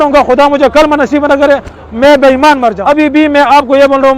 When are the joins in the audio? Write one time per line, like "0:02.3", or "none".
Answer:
0:02.8